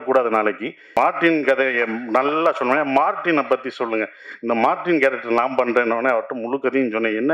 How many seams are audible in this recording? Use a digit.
1